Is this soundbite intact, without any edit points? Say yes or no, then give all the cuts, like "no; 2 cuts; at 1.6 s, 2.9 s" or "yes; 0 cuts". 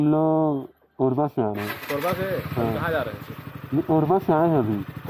yes; 0 cuts